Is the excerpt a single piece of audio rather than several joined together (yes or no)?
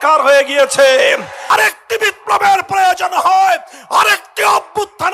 no